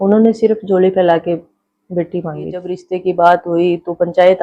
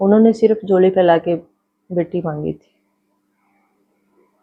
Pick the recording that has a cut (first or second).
first